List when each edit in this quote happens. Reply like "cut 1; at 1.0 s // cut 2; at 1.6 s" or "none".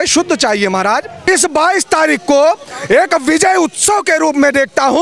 cut 1; at 1.3 s